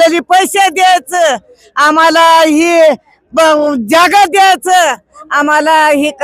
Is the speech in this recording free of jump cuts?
yes; 0 cuts

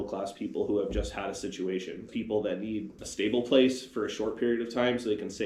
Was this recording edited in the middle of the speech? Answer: yes; 2 cuts; at 2.1 s, 3.0 s

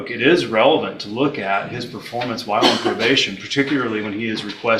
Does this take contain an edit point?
no; 0 cuts

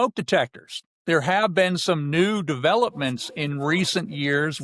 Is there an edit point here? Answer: no; 0 cuts

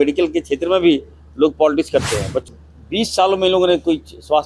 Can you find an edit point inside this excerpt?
yes; 1 cut; at 2.4 s

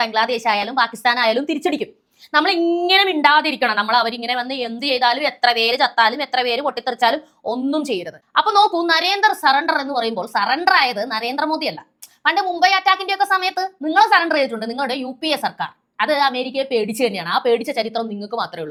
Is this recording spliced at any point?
no; 0 cuts

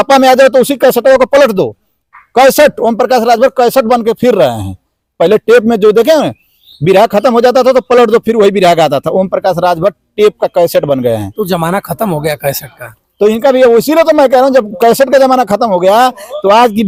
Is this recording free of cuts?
yes; 0 cuts

